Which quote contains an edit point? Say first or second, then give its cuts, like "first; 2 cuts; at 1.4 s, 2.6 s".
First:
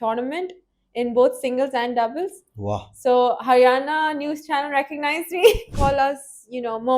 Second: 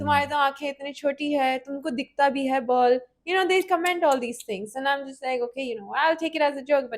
first; 1 cut; at 5.7 s